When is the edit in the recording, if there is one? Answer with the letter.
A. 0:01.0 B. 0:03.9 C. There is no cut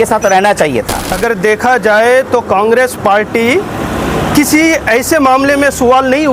A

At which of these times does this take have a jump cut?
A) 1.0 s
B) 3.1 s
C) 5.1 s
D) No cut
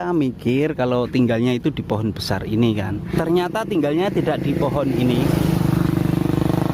B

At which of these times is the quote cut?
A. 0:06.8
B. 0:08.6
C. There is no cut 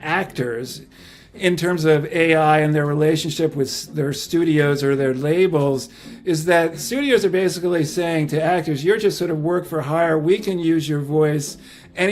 A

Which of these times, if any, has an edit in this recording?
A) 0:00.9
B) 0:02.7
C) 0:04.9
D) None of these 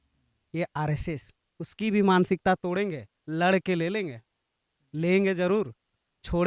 D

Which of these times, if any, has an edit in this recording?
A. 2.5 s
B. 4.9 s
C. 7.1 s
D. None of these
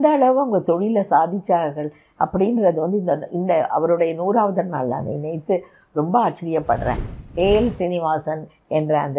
C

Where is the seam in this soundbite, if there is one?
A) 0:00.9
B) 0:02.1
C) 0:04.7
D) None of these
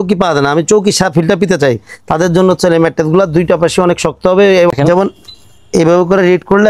C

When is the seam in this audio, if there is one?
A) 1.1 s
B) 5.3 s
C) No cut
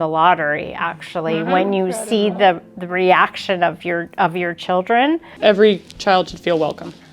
B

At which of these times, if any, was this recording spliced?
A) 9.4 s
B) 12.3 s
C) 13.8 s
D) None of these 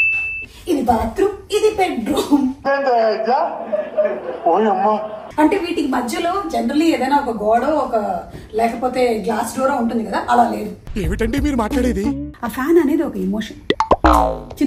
B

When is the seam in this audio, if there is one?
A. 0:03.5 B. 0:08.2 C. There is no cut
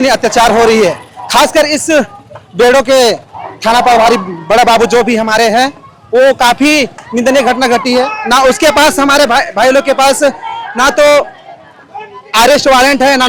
C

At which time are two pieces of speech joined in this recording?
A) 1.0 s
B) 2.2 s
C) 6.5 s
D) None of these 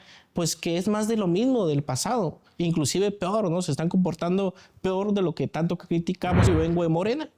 C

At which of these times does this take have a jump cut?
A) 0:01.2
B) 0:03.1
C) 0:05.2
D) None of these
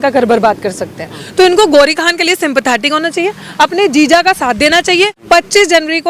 C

